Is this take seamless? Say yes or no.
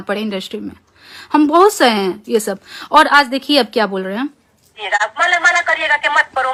yes